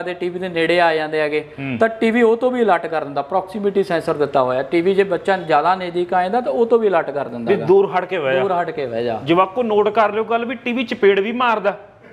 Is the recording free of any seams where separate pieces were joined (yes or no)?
yes